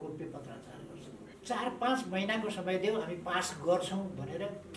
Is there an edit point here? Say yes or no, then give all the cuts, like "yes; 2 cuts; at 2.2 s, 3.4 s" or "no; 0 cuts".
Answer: yes; 1 cut; at 1.3 s